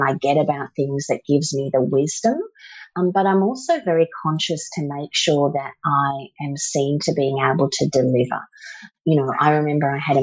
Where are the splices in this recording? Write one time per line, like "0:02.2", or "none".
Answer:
0:08.9

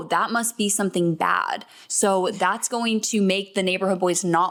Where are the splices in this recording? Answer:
none

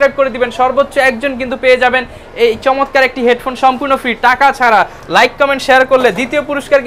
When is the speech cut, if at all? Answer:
none

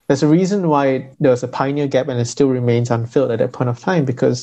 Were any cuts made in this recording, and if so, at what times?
0:01.1

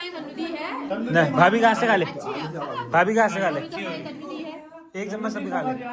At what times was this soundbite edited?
none

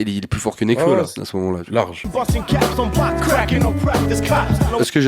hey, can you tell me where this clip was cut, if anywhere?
0:02.1

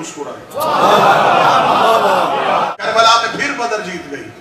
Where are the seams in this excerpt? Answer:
0:02.8

